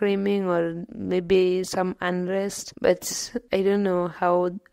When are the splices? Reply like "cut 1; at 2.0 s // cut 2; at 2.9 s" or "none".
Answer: cut 1; at 2.6 s